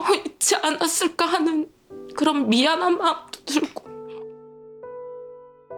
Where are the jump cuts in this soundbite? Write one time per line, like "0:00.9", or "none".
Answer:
0:03.8